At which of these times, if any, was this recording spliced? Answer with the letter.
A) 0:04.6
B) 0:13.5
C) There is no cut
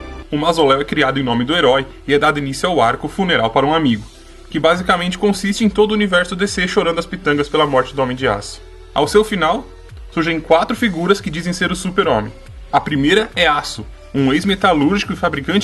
B